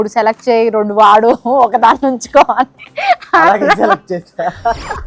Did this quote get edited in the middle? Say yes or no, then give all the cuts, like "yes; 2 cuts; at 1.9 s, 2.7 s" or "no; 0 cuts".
no; 0 cuts